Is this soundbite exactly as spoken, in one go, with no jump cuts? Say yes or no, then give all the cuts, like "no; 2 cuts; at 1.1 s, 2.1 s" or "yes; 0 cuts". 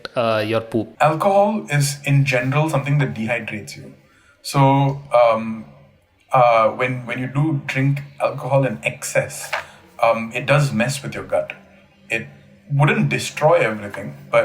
no; 1 cut; at 0.9 s